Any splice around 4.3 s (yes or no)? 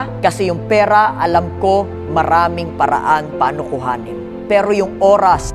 yes